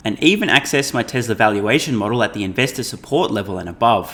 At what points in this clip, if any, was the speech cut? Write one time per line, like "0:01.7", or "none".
none